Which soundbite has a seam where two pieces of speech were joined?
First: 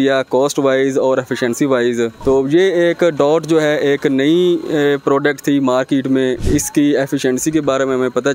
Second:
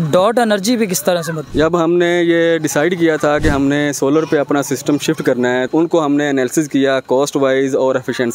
second; 1 cut; at 5.7 s

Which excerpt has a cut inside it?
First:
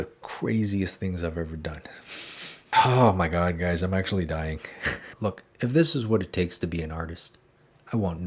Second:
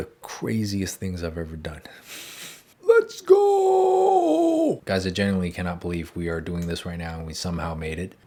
first; 2 cuts; at 2.7 s, 5.0 s

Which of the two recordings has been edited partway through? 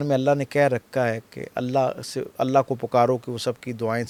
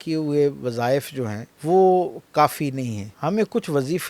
second; 2 cuts; at 1.5 s, 3.0 s

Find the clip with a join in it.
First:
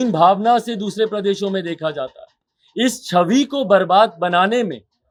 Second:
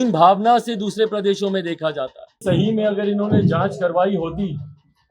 second; 1 cut; at 2.4 s

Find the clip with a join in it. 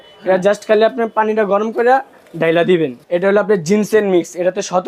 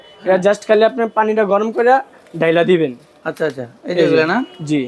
first; 1 cut; at 3.0 s

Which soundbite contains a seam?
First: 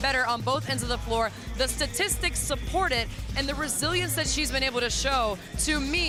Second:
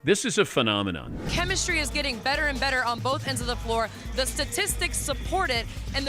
second; 1 cut; at 1.1 s

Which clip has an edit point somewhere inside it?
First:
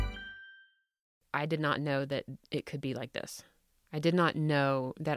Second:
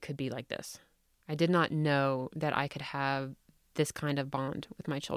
first; 1 cut; at 1.1 s

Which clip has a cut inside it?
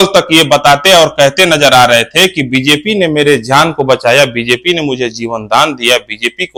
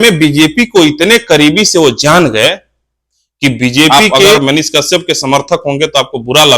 second; 1 cut; at 4.4 s

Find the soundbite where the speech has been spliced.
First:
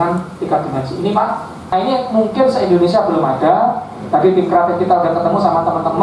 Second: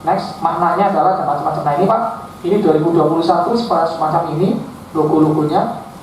first; 1 cut; at 1.7 s

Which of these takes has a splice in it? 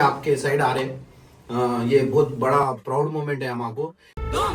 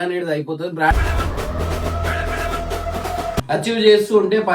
second; 2 cuts; at 0.9 s, 3.4 s

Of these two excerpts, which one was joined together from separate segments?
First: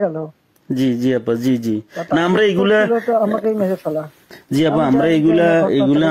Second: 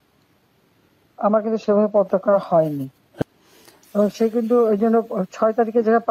second; 1 cut; at 3.2 s

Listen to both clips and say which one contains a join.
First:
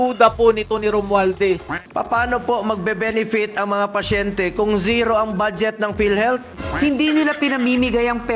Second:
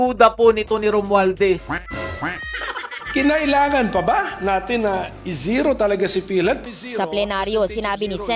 first; 2 cuts; at 1.8 s, 6.5 s

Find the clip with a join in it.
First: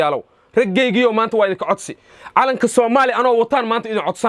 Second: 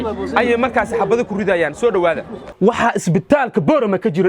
second; 1 cut; at 2.3 s

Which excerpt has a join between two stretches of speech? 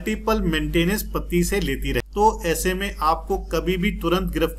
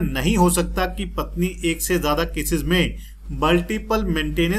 first; 1 cut; at 2.0 s

